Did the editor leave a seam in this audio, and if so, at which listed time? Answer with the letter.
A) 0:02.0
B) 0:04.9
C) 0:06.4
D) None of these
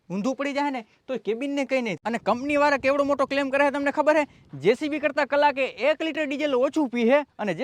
A